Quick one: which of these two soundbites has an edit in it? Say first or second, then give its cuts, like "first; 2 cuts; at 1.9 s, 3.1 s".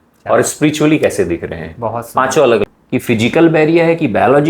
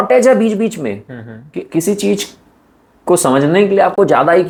first; 1 cut; at 2.6 s